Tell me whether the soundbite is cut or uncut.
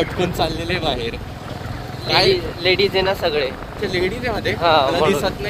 uncut